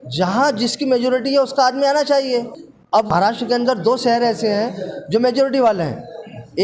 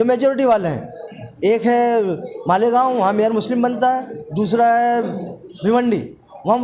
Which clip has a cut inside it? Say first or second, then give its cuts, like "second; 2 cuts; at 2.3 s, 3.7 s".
first; 1 cut; at 3.1 s